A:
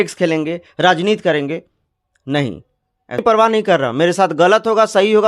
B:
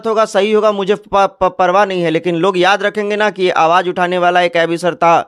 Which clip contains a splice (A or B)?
A